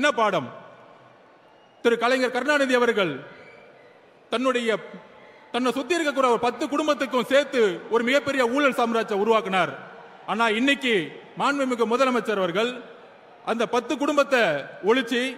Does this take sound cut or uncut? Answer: uncut